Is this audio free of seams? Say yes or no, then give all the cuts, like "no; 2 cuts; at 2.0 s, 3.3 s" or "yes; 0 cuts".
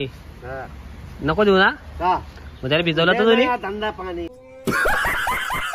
no; 1 cut; at 4.4 s